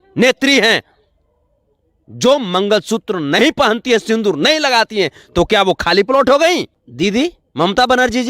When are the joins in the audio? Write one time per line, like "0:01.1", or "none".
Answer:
0:06.8